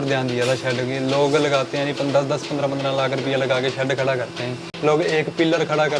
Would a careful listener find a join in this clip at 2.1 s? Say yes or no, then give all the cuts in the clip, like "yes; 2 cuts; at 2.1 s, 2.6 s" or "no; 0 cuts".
no; 1 cut; at 4.6 s